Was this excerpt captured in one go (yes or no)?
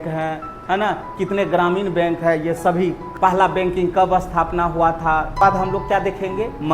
no